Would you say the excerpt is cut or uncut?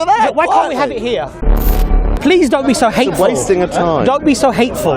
cut